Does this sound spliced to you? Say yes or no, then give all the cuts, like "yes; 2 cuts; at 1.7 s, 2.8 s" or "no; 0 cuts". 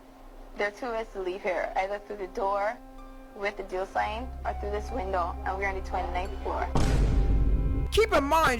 no; 0 cuts